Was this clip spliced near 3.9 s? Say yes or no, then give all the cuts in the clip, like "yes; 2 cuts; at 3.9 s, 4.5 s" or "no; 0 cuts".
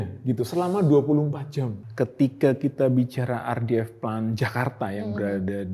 no; 1 cut; at 1.8 s